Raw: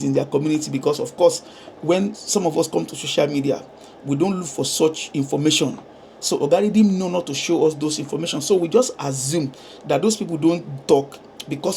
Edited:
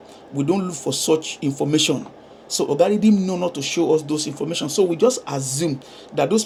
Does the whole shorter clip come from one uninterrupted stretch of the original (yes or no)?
yes